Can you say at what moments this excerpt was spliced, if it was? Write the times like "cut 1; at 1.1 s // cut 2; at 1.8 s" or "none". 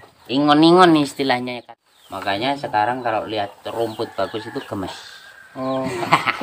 cut 1; at 1.6 s